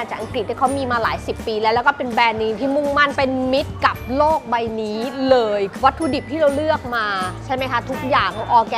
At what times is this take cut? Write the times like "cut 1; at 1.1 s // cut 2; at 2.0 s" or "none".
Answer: none